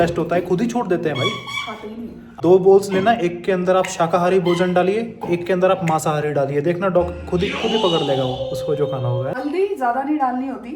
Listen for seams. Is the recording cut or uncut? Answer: cut